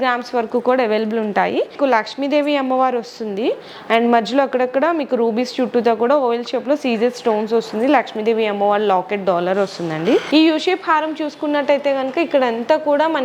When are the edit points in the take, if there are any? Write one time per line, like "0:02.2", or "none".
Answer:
0:01.7
0:10.2